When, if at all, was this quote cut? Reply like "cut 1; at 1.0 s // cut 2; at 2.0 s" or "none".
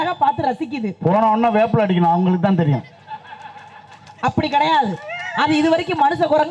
none